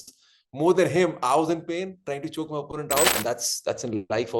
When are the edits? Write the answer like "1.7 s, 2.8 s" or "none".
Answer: 3.1 s